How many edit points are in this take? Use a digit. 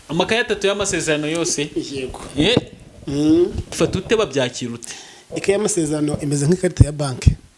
1